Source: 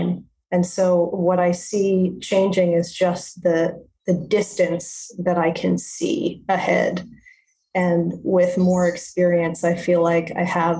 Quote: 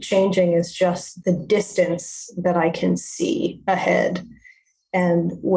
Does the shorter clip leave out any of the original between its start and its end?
yes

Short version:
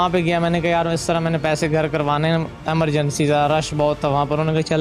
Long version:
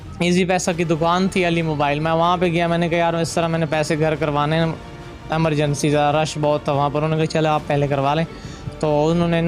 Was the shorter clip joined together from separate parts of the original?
yes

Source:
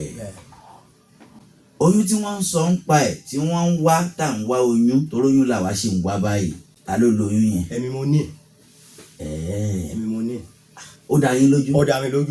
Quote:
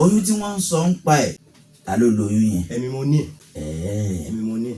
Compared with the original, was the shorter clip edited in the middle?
yes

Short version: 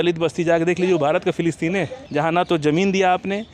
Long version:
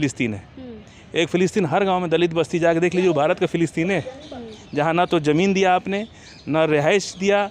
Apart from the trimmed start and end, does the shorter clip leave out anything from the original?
yes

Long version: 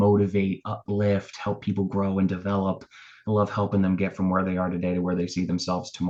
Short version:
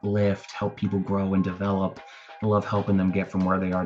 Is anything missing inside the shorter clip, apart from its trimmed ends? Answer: no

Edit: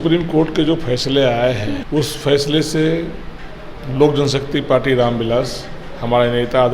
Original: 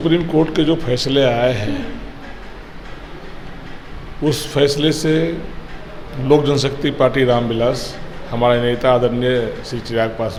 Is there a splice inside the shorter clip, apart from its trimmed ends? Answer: yes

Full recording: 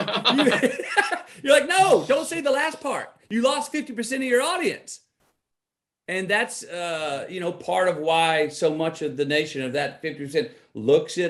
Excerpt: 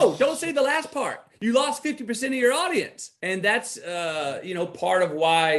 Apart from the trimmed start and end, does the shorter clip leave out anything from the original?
yes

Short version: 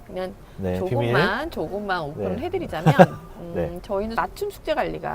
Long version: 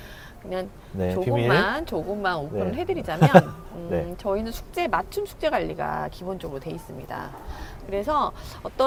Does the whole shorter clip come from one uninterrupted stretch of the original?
no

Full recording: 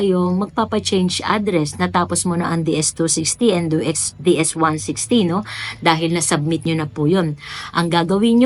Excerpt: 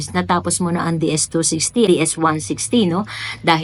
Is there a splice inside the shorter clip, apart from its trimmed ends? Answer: yes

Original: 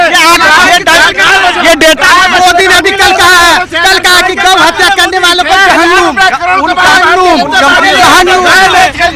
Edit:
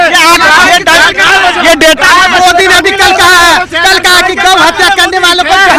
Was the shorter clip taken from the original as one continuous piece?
yes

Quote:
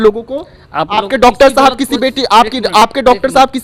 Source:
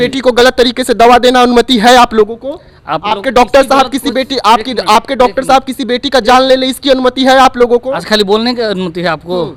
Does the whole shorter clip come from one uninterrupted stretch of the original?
yes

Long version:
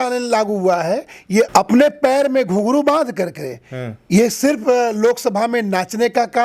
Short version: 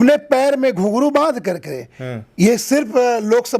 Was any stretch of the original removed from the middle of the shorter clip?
no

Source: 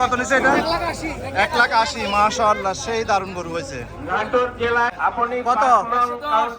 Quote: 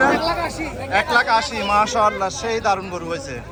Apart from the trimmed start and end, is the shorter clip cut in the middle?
no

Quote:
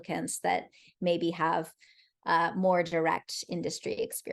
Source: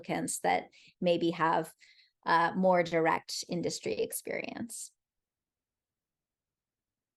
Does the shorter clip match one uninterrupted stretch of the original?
yes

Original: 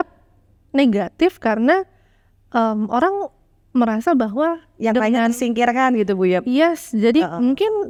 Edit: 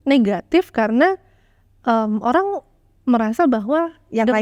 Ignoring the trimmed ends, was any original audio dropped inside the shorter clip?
no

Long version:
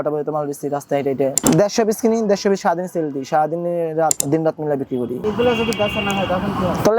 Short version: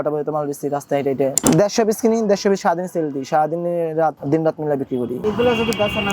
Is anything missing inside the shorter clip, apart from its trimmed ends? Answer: no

